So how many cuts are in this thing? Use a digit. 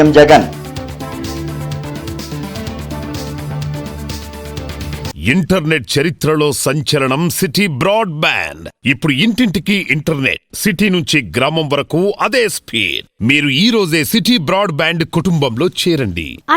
1